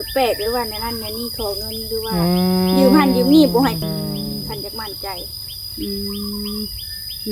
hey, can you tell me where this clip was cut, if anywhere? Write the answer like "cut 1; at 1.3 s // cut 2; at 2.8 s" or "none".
cut 1; at 3.8 s